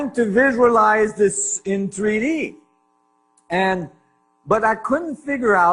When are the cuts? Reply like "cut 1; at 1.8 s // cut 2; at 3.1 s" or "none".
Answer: cut 1; at 2.0 s